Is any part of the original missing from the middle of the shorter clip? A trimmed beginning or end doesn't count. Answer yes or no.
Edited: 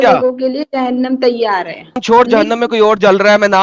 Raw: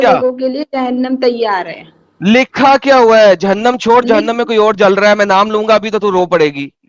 yes